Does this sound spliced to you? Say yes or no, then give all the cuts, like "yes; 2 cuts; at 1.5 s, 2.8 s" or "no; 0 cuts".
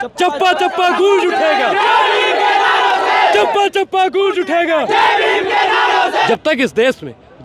yes; 1 cut; at 6.3 s